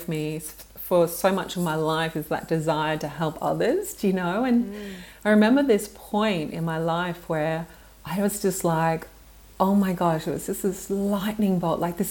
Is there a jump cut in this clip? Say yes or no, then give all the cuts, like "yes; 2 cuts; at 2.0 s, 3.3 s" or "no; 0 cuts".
no; 0 cuts